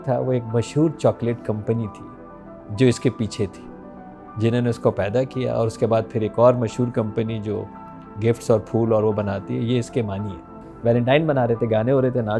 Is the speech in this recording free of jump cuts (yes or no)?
no